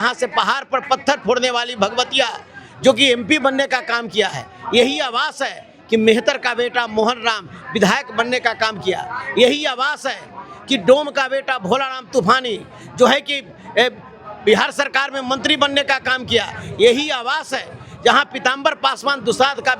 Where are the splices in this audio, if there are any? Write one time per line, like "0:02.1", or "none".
none